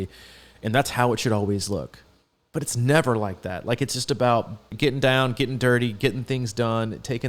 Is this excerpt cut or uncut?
cut